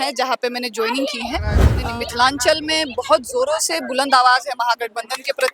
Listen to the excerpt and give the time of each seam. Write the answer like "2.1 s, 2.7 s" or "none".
1.7 s